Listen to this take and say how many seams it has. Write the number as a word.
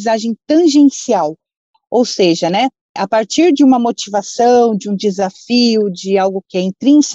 zero